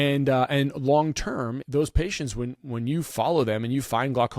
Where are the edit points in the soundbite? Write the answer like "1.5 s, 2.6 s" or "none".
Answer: 1.6 s